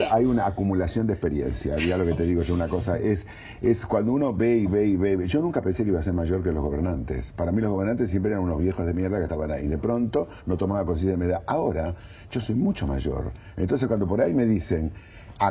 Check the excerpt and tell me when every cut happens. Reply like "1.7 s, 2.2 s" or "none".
4.7 s